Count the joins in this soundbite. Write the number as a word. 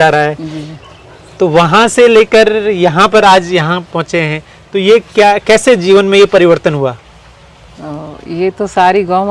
zero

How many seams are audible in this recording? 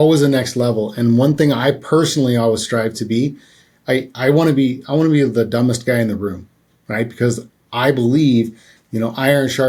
zero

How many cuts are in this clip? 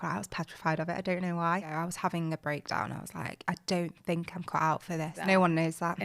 two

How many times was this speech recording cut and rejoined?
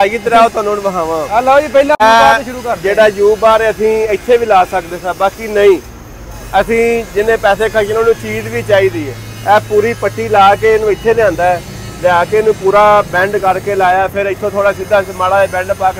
one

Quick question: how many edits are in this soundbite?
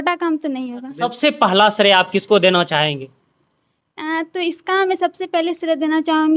one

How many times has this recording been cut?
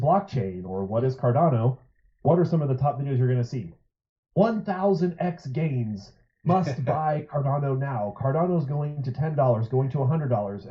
zero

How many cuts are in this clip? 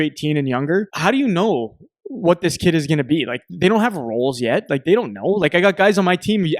one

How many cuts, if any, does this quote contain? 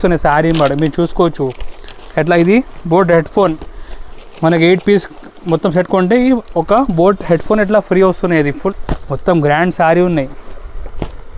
one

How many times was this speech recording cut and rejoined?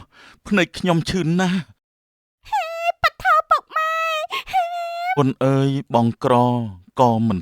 one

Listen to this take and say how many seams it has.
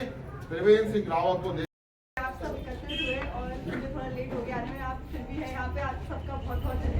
one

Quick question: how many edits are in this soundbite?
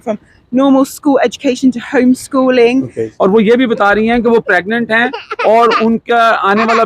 one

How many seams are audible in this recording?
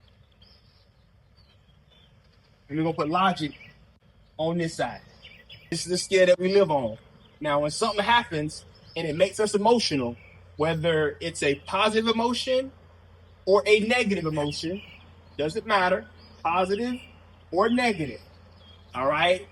one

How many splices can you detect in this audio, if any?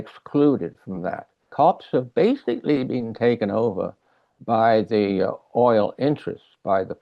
one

